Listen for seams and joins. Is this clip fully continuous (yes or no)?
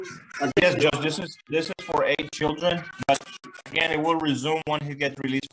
yes